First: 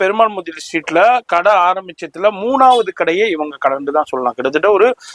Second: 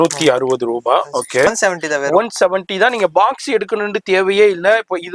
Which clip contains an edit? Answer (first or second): second